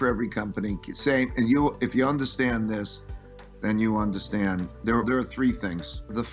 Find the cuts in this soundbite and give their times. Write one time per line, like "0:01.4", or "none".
none